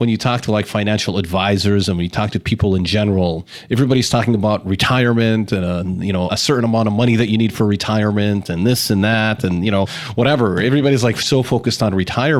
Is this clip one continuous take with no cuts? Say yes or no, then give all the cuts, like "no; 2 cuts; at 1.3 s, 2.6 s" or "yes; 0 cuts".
yes; 0 cuts